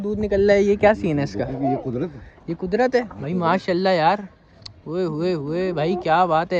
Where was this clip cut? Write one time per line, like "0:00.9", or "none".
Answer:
none